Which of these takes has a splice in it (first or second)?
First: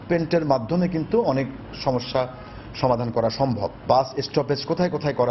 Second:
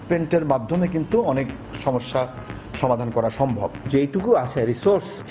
second